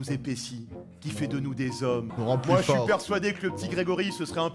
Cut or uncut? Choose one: cut